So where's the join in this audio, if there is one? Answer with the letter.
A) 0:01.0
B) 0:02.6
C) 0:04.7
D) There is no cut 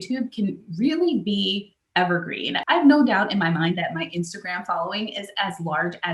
B